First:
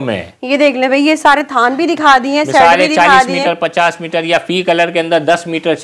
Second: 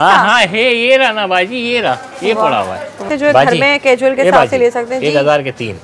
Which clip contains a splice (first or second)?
second